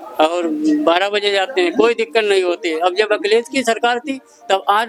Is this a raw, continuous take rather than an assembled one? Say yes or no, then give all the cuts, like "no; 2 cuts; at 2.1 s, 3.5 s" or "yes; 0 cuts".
yes; 0 cuts